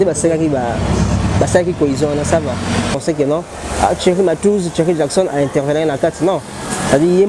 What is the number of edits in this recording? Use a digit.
1